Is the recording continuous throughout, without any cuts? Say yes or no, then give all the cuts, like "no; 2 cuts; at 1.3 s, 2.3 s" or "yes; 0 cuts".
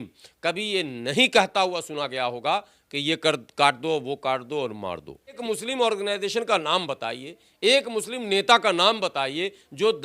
no; 1 cut; at 5.4 s